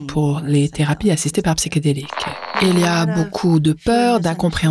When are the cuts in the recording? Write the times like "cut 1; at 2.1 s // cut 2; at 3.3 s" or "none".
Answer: cut 1; at 2.5 s